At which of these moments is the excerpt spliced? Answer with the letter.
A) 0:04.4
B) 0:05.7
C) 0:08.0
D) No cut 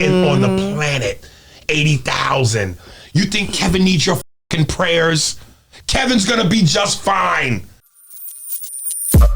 C